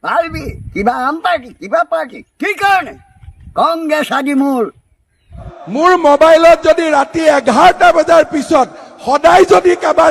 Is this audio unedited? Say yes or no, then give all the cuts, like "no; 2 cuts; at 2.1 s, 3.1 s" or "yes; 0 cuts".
no; 1 cut; at 5.6 s